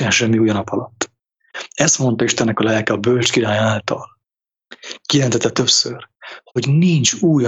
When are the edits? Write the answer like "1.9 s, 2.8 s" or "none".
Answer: none

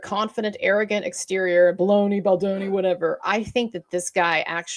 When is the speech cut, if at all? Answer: none

